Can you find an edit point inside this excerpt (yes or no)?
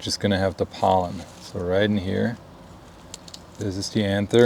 no